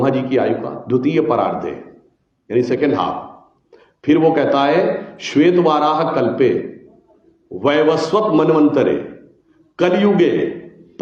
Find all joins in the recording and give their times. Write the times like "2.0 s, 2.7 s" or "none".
none